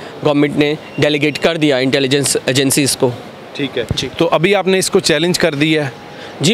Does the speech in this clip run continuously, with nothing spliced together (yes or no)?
yes